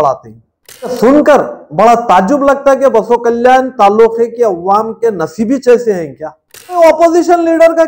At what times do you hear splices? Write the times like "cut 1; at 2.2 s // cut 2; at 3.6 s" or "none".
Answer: cut 1; at 0.9 s // cut 2; at 6.8 s